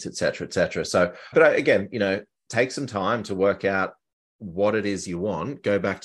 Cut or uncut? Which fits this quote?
uncut